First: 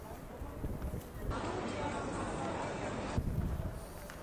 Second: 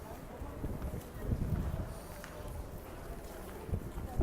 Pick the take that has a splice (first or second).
second